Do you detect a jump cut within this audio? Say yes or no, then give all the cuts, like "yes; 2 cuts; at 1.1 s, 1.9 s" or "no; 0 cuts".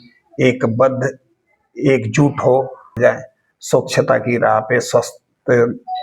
yes; 1 cut; at 3.0 s